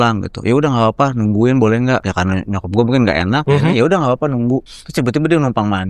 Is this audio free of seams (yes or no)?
no